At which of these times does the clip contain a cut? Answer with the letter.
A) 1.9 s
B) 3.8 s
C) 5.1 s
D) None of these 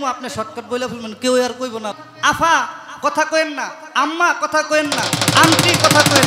A